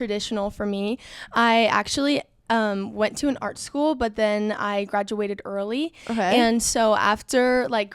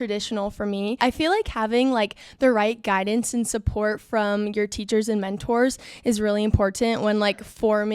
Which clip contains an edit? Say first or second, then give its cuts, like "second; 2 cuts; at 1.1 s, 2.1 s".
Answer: second; 1 cut; at 1.0 s